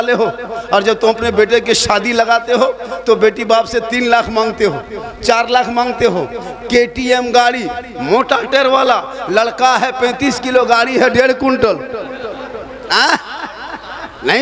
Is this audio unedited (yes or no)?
yes